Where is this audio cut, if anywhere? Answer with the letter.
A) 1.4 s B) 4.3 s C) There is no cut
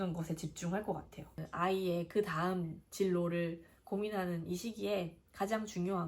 A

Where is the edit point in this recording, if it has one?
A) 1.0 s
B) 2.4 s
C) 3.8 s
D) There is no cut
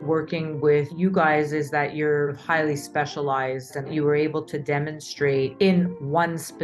C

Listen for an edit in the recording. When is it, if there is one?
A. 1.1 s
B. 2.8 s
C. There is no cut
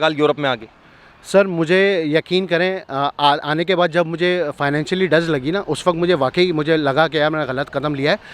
C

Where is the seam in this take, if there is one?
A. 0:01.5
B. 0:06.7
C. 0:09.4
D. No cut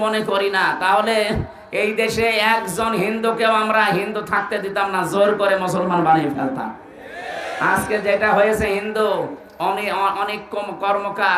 D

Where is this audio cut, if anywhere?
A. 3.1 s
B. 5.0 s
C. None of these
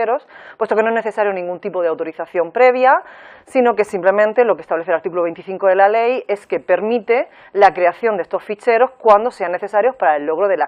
B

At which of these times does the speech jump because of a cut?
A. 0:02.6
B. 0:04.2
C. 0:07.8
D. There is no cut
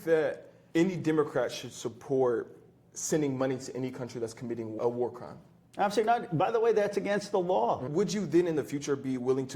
C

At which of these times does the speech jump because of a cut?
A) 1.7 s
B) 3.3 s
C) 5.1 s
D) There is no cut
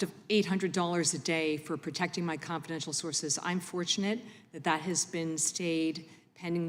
D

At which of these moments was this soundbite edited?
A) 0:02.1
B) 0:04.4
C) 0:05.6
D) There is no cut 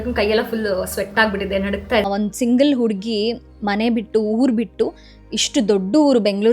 A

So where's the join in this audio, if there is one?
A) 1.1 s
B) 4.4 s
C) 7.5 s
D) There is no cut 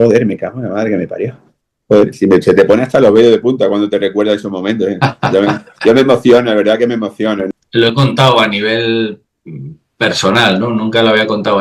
C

